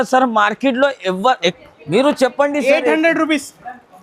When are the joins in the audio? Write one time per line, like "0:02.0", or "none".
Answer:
0:01.6

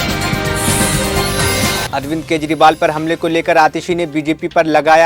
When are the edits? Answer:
0:01.9

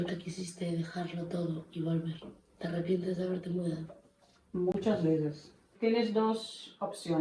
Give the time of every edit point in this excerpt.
0:05.7

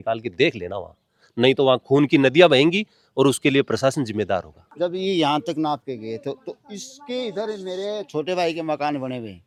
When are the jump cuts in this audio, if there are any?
none

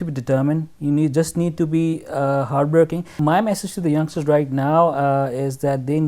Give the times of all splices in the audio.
0:03.2

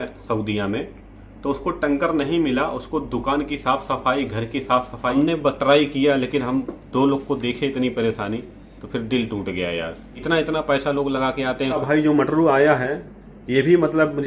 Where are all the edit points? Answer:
0:05.1
0:11.8

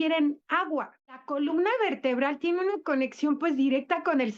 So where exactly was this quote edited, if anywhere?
0:01.3

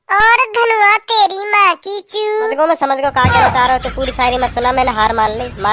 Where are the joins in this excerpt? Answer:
0:02.5

